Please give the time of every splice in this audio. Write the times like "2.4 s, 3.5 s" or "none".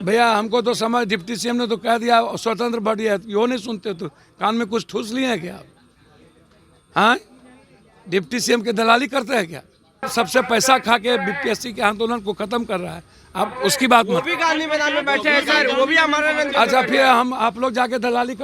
10.1 s